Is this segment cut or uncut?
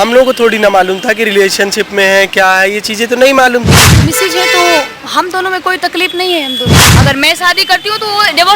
cut